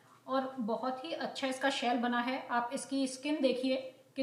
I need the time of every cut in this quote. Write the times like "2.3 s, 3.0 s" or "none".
none